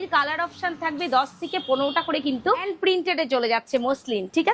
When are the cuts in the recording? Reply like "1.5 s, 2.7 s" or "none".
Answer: 2.7 s